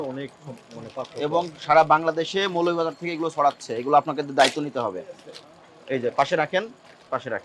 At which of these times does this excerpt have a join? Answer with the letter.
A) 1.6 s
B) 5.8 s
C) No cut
C